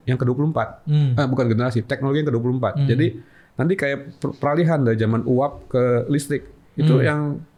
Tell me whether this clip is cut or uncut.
uncut